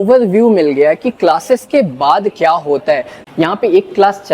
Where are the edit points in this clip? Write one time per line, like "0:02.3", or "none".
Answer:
0:03.2